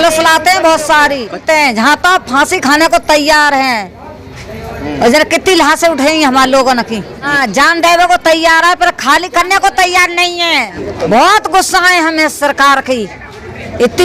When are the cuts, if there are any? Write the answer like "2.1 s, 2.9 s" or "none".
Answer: 1.4 s, 7.3 s, 10.8 s